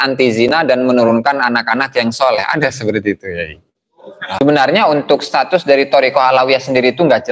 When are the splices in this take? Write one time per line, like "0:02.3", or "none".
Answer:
0:04.4